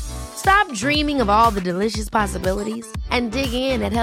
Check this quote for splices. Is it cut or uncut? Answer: uncut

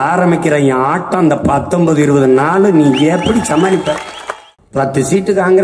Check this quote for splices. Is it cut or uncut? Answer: cut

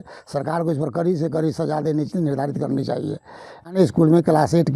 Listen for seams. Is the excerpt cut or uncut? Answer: cut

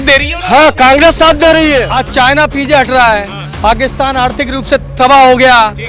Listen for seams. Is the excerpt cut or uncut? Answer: cut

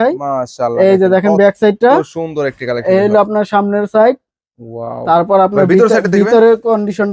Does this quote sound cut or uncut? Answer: uncut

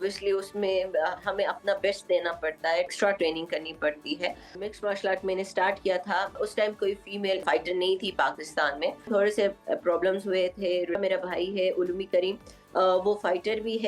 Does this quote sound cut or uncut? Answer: cut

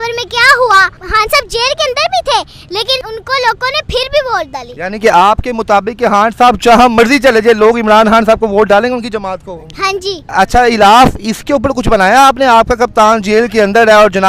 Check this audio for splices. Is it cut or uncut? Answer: uncut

